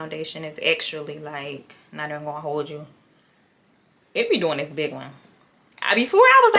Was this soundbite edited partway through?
no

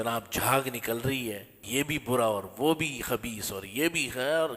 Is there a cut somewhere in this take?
yes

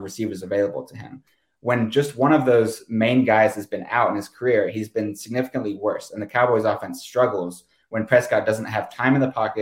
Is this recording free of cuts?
yes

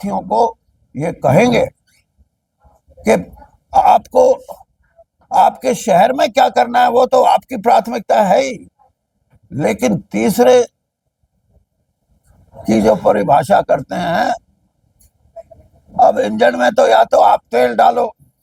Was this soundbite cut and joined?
no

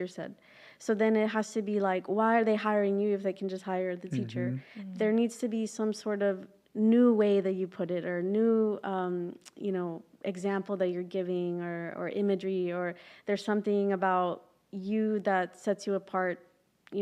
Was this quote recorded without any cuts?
yes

